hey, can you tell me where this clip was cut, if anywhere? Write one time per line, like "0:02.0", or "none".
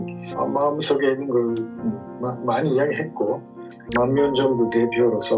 0:03.8